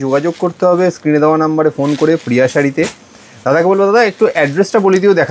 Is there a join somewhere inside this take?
no; 0 cuts

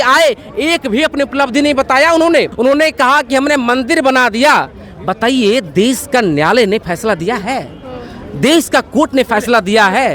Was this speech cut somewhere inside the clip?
yes; 1 cut; at 2.5 s

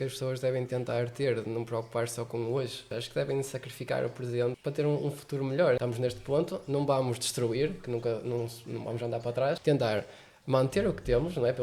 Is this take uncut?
no; 4 cuts; at 2.9 s, 4.6 s, 5.8 s, 9.6 s

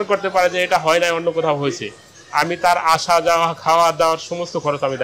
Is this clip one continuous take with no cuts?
yes; 0 cuts

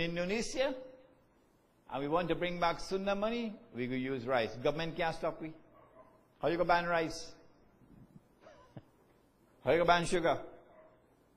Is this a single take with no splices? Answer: no; 1 cut; at 9.9 s

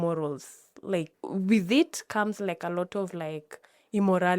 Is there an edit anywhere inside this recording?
yes; 1 cut; at 1.2 s

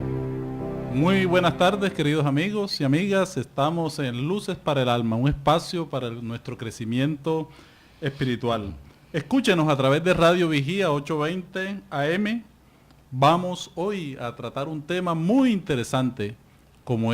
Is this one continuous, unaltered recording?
no; 1 cut; at 8.5 s

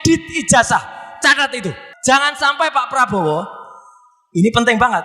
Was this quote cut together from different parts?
yes; 1 cut; at 1.9 s

